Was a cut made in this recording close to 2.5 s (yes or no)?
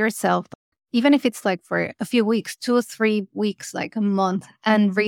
no